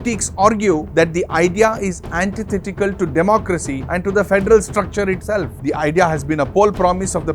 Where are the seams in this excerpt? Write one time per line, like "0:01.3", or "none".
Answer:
0:05.5